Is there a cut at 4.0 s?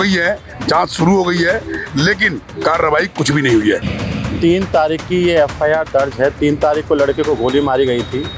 yes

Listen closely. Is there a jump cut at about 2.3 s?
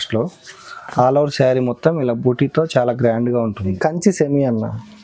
no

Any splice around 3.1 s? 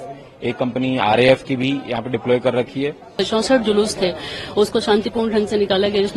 yes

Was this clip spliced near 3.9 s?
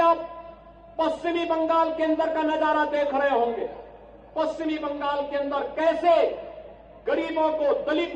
no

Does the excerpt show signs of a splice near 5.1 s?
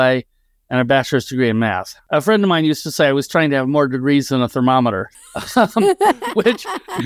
no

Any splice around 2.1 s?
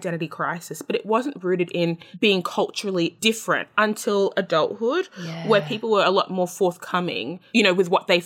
yes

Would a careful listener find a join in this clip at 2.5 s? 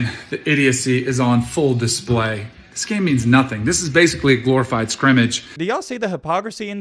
no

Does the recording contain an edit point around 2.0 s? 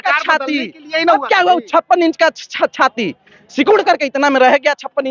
no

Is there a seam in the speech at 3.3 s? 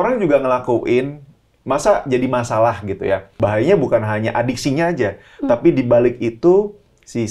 yes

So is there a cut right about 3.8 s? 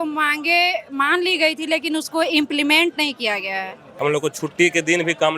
yes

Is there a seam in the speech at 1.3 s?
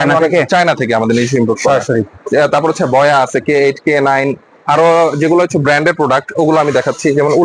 no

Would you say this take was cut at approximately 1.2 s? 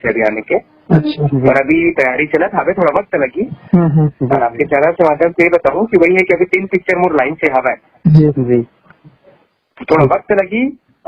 no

